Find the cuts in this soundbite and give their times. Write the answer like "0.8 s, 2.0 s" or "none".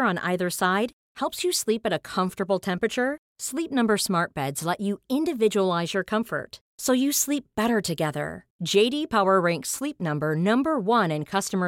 none